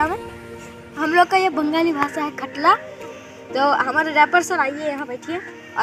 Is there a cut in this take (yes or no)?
yes